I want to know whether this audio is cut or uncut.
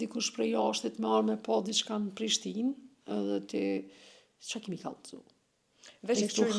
uncut